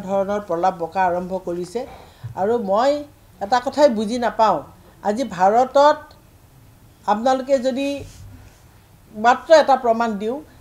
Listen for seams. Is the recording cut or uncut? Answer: uncut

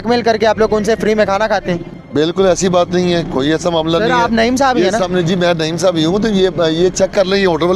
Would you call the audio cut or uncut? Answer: cut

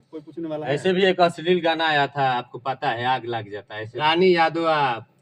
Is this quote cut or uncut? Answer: cut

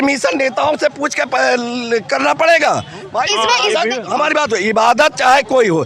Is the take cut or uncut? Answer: uncut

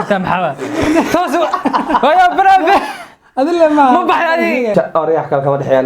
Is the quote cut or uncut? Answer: cut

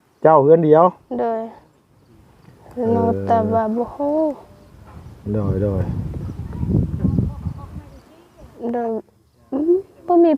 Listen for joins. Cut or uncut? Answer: cut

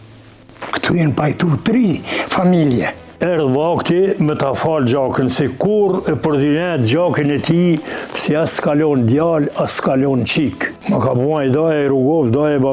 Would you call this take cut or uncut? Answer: cut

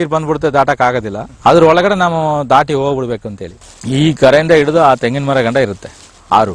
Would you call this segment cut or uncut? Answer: cut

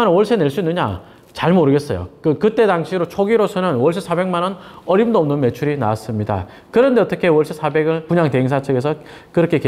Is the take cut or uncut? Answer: uncut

